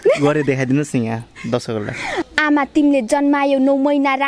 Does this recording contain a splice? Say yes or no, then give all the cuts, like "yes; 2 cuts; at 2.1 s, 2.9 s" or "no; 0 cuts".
yes; 1 cut; at 2.3 s